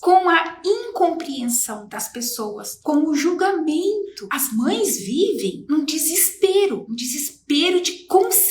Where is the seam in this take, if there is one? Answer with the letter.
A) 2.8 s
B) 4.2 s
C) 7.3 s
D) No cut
B